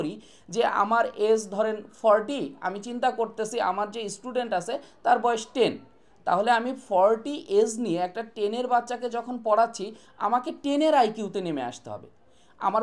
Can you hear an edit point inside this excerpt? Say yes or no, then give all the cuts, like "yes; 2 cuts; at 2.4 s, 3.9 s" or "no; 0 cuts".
no; 0 cuts